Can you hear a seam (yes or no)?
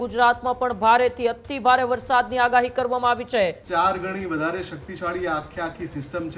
yes